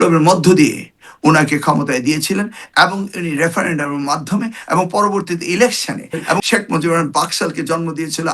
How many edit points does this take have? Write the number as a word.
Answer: one